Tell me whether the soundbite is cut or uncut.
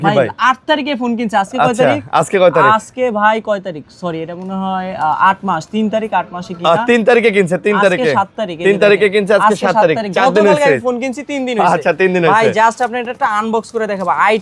uncut